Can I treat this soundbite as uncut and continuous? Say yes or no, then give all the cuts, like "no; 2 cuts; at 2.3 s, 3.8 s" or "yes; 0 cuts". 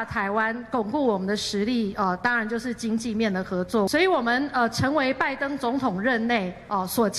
no; 1 cut; at 3.9 s